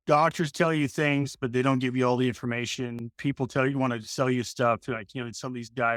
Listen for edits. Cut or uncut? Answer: uncut